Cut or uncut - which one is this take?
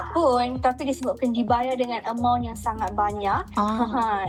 uncut